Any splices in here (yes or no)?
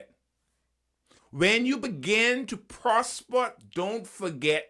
yes